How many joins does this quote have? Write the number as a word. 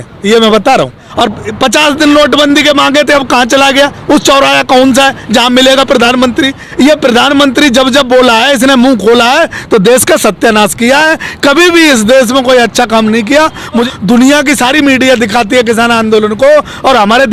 three